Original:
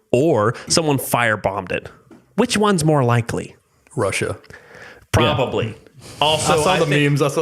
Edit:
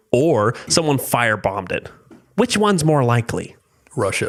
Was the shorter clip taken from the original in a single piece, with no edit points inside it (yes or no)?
yes